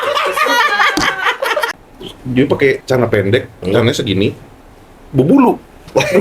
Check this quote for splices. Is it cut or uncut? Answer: cut